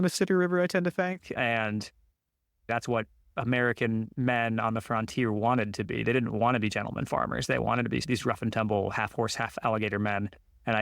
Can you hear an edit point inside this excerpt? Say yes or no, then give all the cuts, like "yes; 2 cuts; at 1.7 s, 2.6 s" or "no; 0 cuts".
yes; 1 cut; at 2.7 s